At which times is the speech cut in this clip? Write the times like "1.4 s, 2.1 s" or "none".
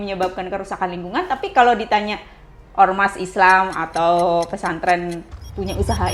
none